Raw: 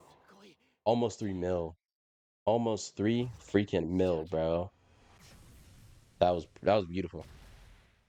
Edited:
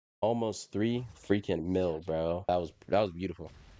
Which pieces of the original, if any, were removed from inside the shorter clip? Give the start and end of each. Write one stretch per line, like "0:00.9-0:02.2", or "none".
0:04.7-0:06.2